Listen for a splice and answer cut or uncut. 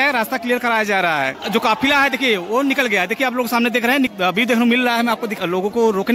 cut